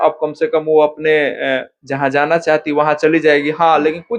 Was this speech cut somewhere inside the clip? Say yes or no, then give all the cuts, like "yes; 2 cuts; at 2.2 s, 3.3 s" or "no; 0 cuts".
no; 0 cuts